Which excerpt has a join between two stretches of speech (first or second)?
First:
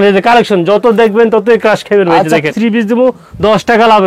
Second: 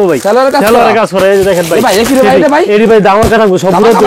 first